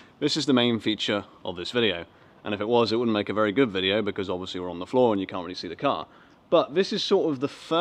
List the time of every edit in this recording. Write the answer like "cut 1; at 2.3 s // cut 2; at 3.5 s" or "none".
none